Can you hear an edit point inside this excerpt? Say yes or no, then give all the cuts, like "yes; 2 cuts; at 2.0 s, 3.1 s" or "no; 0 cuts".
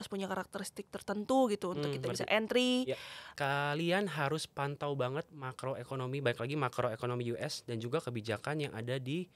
yes; 1 cut; at 3.2 s